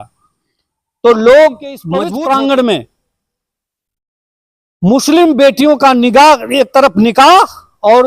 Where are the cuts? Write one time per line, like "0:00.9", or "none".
0:01.9